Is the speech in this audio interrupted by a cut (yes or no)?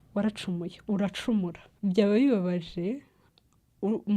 yes